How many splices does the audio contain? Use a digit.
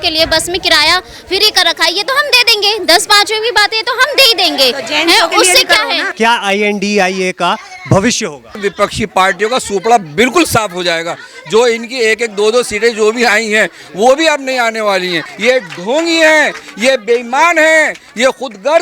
3